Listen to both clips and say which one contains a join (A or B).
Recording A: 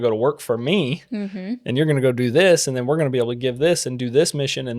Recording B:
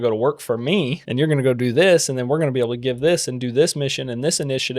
B